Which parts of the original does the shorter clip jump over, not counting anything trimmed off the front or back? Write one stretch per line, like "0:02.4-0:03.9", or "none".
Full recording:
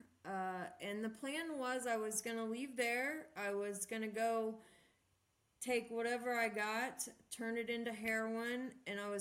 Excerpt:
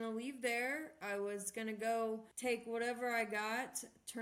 0:04.6-0:05.5